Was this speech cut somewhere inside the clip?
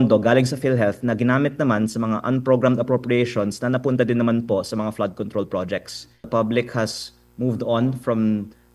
yes; 1 cut; at 6.3 s

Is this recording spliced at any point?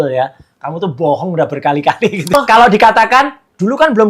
yes; 1 cut; at 2.3 s

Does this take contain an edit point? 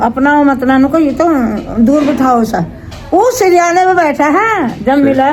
no; 0 cuts

